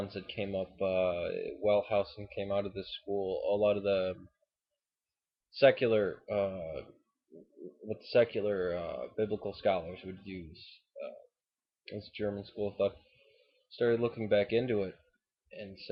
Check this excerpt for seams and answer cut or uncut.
uncut